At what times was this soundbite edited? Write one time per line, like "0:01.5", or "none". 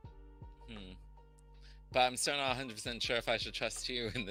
none